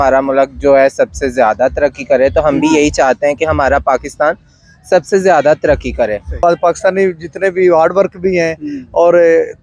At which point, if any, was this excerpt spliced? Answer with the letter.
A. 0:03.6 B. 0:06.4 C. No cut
B